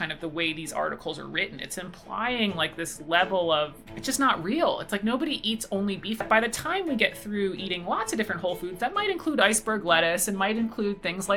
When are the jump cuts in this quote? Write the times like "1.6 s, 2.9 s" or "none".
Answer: 3.9 s, 6.2 s